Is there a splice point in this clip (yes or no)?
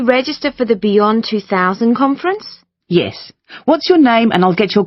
no